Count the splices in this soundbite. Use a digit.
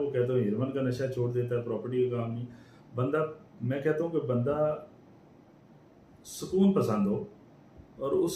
0